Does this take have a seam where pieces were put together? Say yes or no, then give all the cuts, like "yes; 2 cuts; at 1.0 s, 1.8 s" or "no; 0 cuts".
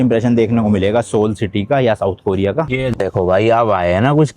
yes; 1 cut; at 2.8 s